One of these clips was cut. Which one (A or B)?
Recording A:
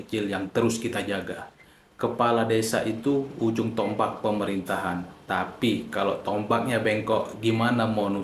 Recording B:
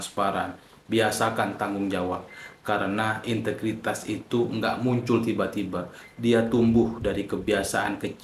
A